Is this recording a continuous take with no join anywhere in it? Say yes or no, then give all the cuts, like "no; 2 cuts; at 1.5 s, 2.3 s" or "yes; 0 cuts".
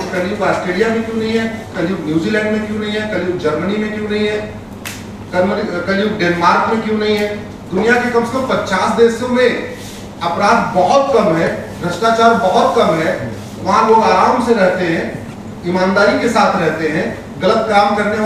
yes; 0 cuts